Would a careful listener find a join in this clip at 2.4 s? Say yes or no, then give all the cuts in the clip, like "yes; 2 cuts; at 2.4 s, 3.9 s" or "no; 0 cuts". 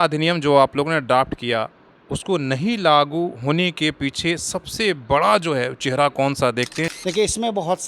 no; 1 cut; at 6.9 s